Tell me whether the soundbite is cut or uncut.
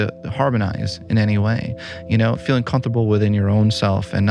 cut